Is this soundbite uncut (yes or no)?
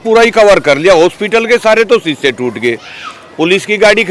yes